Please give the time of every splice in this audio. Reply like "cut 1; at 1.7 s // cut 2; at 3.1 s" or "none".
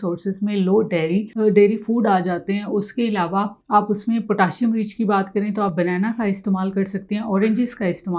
cut 1; at 1.3 s // cut 2; at 3.6 s